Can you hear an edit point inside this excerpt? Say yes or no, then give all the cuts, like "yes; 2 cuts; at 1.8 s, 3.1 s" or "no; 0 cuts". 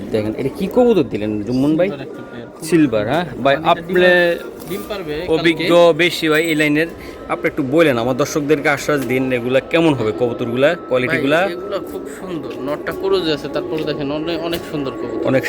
no; 0 cuts